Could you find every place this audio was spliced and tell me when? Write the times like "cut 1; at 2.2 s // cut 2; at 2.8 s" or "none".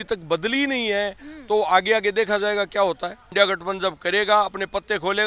cut 1; at 3.3 s